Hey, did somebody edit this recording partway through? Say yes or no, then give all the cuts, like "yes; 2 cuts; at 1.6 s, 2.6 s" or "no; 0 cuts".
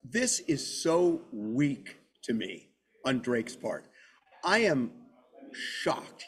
no; 0 cuts